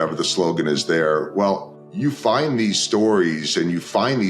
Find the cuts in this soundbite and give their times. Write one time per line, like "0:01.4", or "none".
0:01.8